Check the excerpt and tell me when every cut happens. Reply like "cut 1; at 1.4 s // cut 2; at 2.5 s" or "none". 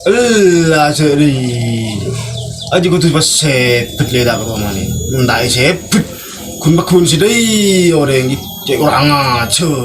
none